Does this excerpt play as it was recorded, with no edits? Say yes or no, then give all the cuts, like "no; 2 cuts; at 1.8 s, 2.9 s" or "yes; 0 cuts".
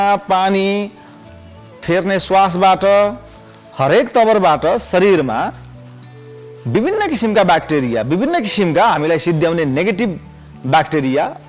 yes; 0 cuts